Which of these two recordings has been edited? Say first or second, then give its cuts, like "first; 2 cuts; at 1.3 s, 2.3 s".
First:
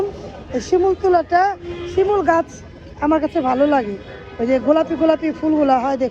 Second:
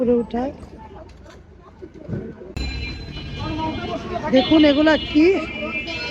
second; 1 cut; at 2.5 s